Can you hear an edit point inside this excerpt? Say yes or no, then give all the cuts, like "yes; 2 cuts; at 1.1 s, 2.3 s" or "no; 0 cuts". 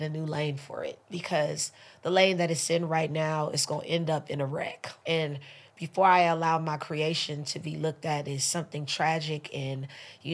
yes; 1 cut; at 5.0 s